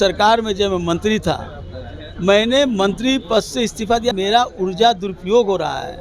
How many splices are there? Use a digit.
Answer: 1